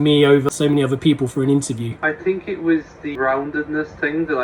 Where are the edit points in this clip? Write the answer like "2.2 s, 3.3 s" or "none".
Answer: 2.0 s, 3.1 s